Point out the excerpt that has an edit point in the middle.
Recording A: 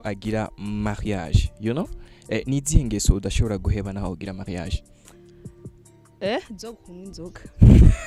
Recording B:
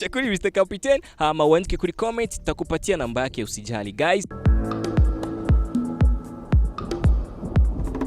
B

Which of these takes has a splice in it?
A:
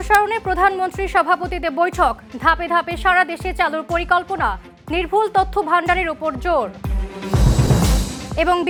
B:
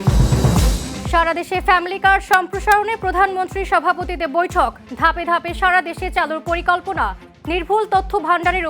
B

